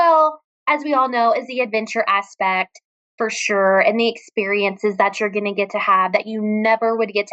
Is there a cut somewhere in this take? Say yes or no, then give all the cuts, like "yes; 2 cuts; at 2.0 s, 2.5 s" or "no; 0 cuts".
no; 0 cuts